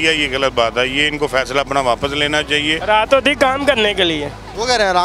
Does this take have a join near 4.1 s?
no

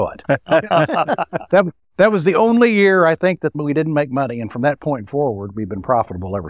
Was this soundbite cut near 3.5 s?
yes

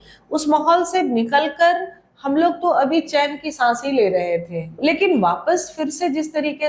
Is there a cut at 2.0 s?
no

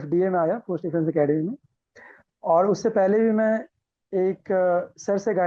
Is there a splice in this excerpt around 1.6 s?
no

